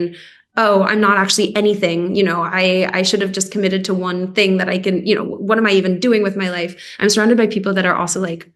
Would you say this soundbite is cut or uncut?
uncut